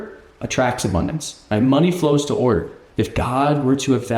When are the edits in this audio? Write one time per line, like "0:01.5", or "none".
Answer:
0:02.8

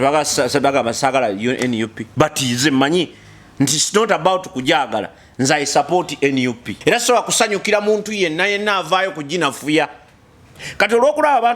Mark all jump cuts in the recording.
0:06.7
0:10.6

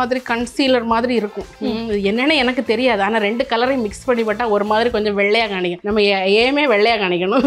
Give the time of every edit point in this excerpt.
0:05.8

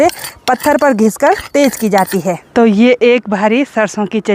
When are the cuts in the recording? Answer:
0:02.4

